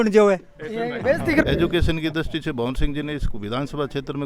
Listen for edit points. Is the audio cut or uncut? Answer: cut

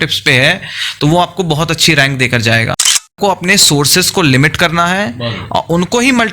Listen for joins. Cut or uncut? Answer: cut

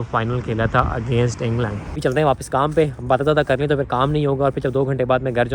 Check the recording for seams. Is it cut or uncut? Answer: cut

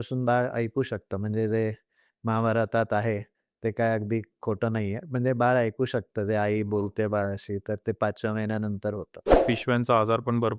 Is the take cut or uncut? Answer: cut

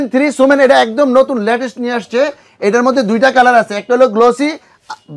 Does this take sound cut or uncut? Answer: uncut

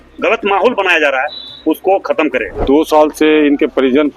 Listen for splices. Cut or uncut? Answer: cut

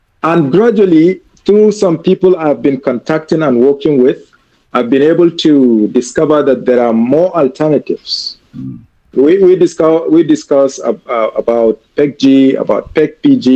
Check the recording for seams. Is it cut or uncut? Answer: uncut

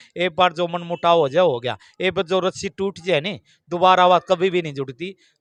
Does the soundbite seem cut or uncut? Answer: uncut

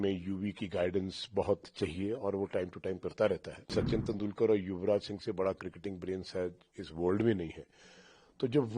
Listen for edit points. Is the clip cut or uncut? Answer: cut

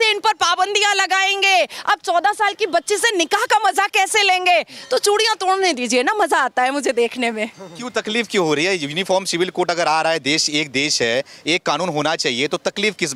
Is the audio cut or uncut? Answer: uncut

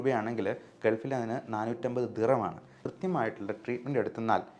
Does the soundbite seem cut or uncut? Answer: cut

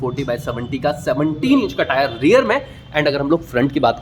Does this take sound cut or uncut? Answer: uncut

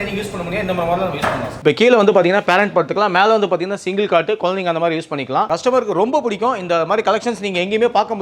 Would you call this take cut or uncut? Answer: cut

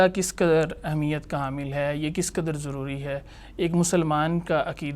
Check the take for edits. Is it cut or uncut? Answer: uncut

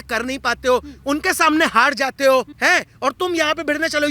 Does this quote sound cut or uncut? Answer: cut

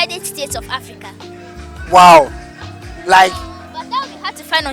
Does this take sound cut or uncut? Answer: uncut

